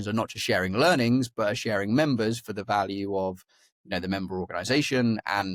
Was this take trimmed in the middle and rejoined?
no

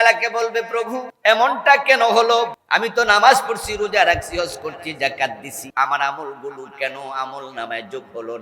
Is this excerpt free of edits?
no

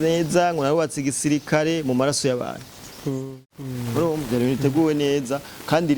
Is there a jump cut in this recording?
yes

